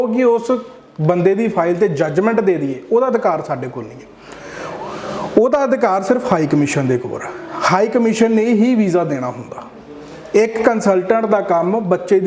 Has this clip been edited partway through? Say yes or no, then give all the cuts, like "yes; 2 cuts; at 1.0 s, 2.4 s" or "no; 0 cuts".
no; 0 cuts